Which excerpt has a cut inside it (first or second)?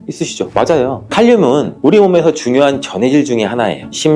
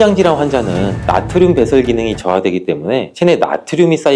first